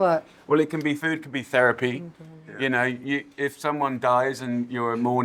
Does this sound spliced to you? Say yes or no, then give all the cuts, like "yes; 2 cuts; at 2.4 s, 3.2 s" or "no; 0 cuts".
yes; 1 cut; at 1.0 s